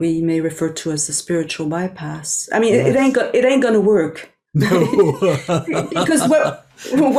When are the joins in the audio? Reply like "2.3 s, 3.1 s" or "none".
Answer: none